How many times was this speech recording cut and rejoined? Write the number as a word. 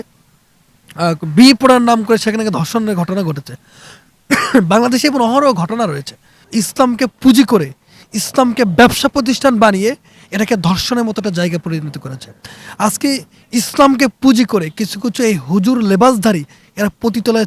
one